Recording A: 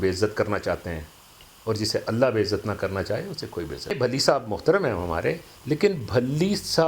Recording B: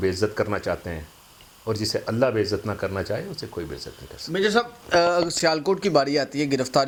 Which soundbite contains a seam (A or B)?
A